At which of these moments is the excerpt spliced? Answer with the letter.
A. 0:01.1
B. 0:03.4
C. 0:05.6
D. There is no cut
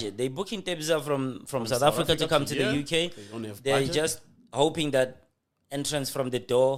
D